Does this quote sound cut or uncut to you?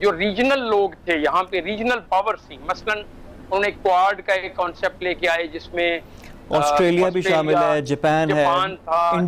uncut